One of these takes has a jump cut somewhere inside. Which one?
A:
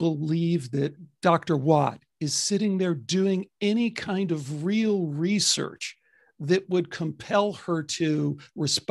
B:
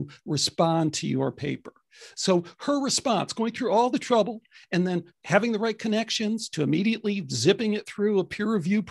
A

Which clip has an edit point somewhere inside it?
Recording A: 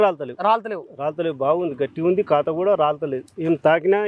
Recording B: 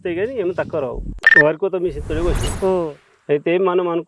B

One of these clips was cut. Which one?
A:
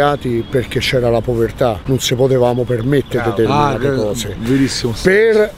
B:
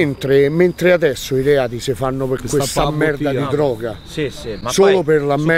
A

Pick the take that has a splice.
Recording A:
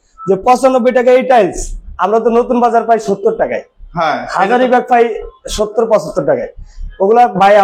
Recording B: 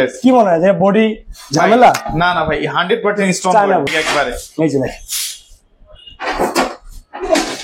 B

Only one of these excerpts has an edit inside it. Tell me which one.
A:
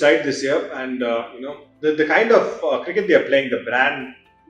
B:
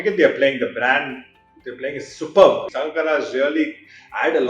B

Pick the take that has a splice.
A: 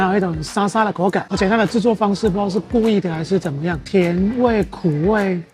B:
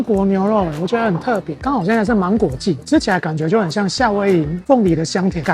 B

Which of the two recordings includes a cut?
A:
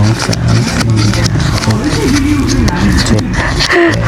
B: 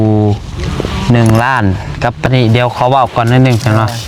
B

